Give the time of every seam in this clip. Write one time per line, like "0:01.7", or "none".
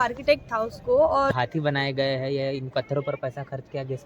0:01.3